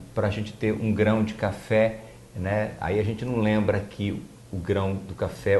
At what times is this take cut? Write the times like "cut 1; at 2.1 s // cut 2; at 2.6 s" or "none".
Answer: none